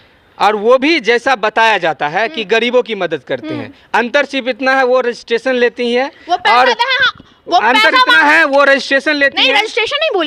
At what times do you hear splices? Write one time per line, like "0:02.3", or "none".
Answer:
none